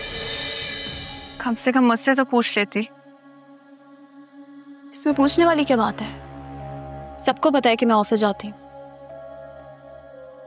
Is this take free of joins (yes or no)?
no